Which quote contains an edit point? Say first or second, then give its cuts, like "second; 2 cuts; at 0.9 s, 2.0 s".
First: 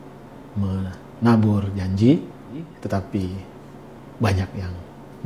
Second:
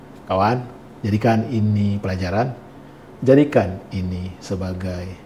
first; 1 cut; at 2.8 s